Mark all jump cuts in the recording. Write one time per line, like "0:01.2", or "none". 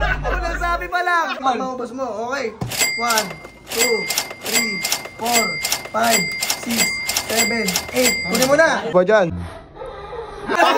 0:01.4
0:08.9

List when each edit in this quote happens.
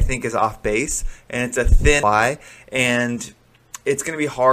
0:02.0

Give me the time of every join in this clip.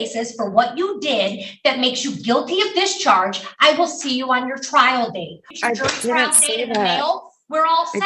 0:05.4

